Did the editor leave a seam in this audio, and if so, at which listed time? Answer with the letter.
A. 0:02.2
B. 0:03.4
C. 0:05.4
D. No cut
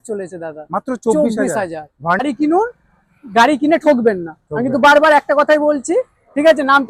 A